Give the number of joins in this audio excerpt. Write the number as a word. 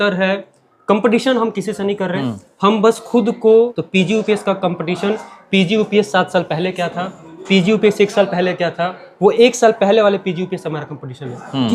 one